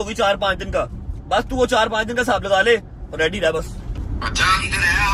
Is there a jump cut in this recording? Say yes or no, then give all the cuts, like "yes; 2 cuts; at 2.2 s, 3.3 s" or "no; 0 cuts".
no; 0 cuts